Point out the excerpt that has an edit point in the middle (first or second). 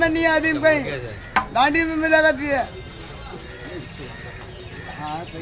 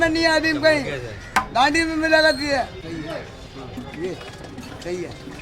second